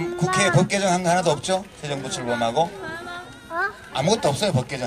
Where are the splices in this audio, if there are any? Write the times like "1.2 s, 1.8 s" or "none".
1.5 s